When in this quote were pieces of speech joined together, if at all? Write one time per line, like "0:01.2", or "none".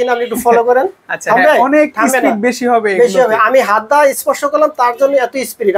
none